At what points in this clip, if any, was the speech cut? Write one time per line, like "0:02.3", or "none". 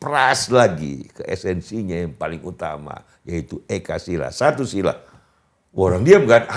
none